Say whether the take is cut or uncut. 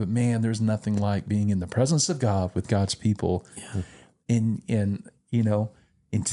uncut